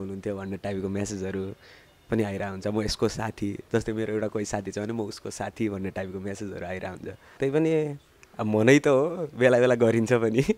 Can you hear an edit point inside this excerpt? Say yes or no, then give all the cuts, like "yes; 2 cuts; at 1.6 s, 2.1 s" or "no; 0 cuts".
yes; 1 cut; at 7.2 s